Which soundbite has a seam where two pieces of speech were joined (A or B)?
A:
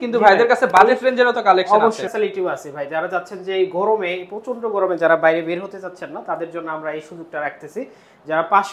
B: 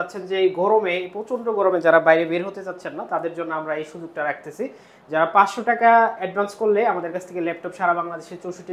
A